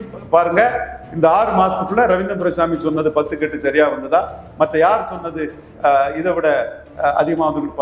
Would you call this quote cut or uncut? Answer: uncut